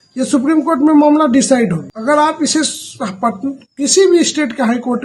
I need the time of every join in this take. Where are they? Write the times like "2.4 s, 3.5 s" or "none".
1.9 s